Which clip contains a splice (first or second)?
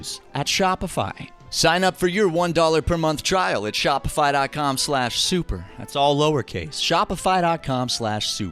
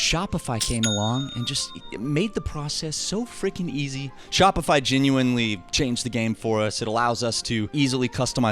second